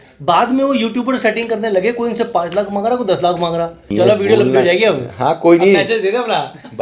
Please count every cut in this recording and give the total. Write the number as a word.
zero